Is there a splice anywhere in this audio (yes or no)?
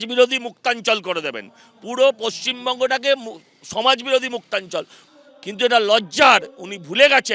no